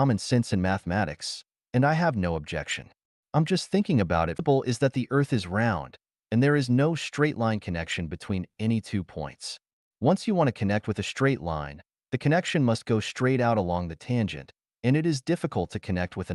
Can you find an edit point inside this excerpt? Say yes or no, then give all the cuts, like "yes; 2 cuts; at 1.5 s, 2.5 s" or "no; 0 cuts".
yes; 1 cut; at 4.4 s